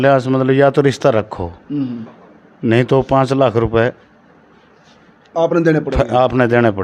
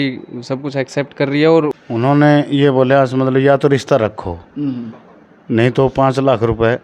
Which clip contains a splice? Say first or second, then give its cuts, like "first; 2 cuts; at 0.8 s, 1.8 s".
second; 1 cut; at 1.8 s